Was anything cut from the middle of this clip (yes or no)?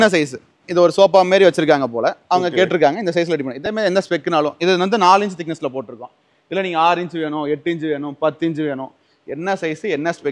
no